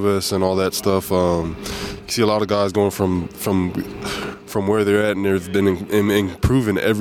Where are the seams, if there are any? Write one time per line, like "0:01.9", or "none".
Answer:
none